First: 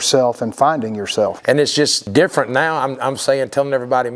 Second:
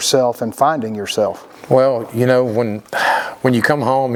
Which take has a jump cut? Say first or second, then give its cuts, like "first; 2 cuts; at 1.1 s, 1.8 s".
first; 1 cut; at 1.7 s